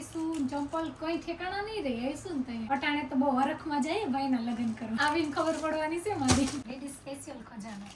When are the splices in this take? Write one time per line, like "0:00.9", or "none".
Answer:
0:06.6